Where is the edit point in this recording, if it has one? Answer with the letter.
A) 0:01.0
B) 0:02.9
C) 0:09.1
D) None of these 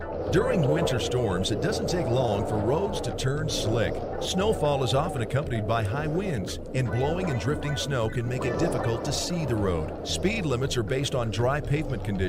A